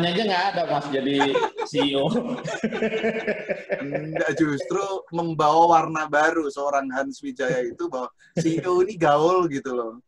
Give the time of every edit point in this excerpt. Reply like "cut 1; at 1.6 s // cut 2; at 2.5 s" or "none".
none